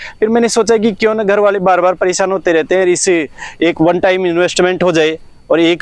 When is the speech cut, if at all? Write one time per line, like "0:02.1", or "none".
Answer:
none